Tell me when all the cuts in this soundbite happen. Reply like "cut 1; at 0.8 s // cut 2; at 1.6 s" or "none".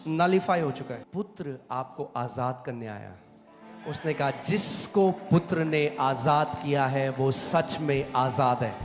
cut 1; at 1.1 s